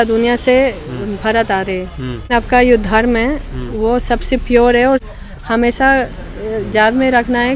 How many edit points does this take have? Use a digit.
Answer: 2